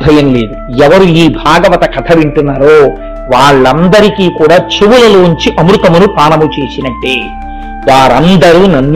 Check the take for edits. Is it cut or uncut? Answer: uncut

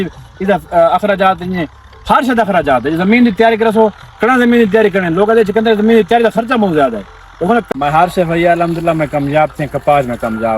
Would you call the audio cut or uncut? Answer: cut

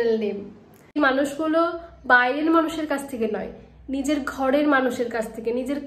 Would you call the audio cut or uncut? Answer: cut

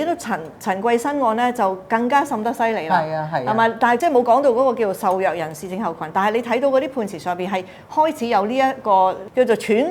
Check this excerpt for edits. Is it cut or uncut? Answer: cut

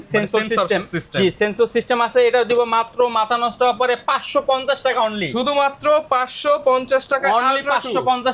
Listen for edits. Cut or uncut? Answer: uncut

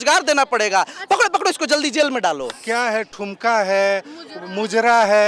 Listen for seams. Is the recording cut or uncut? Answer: cut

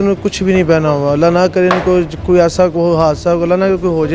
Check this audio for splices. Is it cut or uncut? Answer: uncut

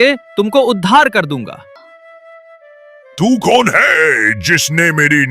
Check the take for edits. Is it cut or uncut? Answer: cut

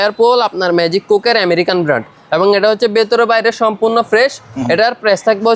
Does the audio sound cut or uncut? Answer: cut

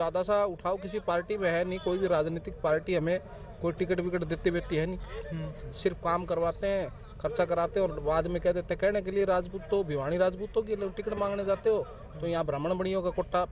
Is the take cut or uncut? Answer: uncut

